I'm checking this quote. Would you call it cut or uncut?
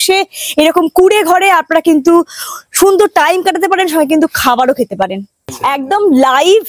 cut